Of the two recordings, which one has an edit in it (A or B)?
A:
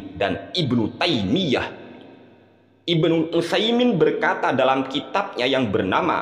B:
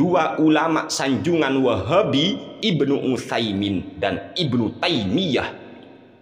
B